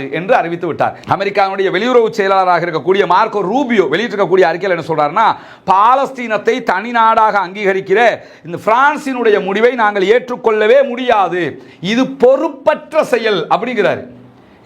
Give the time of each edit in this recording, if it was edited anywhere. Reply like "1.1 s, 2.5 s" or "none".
1.0 s